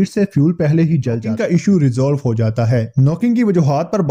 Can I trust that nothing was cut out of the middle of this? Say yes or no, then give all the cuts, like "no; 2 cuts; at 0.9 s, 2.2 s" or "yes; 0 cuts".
no; 1 cut; at 1.3 s